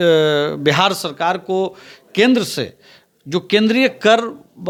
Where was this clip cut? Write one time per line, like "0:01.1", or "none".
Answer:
none